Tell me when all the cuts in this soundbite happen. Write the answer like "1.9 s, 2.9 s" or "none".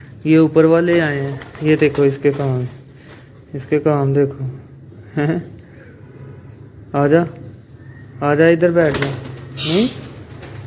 none